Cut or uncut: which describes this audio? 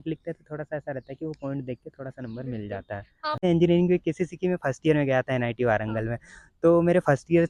cut